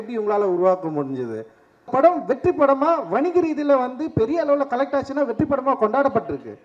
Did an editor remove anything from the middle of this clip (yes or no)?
yes